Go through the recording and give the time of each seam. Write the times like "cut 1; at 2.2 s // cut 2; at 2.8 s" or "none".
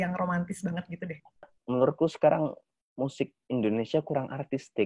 cut 1; at 1.5 s